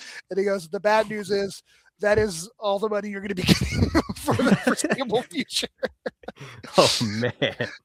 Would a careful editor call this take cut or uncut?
uncut